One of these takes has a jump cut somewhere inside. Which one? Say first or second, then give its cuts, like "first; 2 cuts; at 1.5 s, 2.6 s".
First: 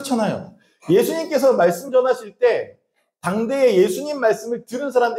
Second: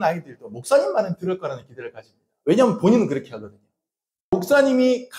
second; 1 cut; at 4.3 s